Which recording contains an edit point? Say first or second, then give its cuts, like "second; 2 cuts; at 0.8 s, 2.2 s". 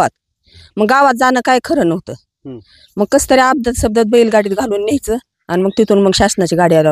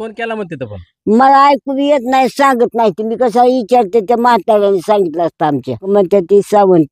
second; 1 cut; at 5.8 s